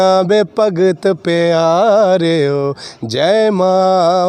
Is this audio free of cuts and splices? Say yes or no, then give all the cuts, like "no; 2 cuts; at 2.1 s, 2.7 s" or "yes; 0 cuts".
yes; 0 cuts